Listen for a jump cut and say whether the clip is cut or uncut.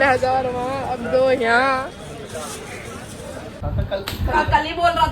cut